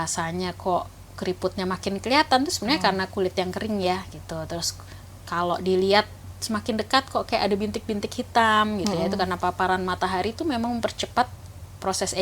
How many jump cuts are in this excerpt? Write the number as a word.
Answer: zero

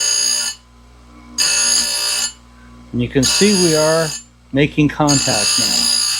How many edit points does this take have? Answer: zero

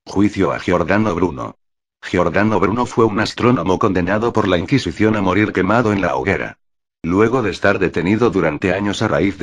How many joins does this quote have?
zero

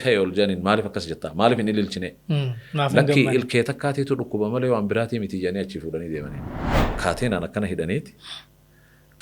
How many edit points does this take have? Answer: one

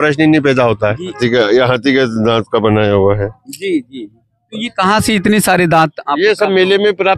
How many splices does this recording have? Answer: one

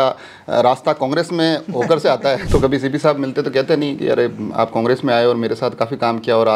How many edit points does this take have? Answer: one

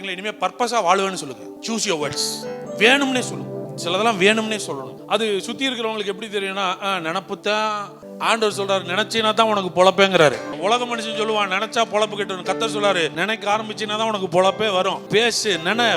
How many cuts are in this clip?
eight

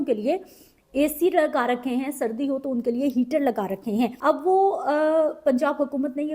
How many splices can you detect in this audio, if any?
one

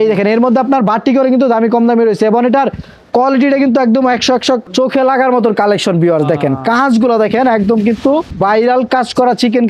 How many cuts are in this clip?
two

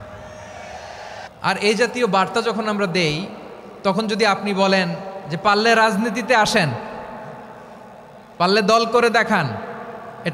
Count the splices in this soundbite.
one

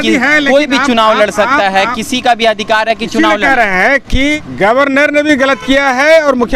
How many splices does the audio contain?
one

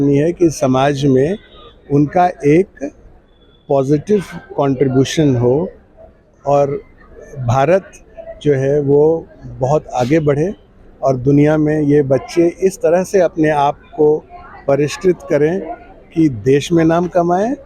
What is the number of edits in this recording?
zero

